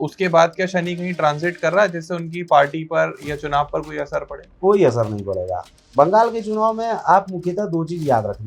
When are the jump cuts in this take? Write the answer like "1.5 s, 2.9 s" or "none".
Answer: none